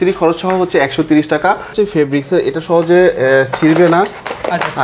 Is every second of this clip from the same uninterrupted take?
no; 1 cut; at 1.7 s

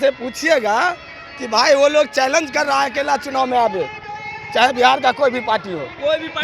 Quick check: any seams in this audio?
no; 0 cuts

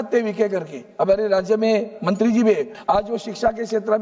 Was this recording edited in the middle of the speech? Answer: yes; 1 cut; at 2.7 s

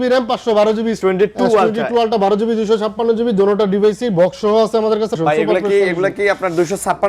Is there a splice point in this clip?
yes; 2 cuts; at 1.0 s, 5.2 s

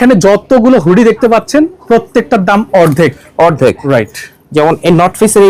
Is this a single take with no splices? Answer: yes; 0 cuts

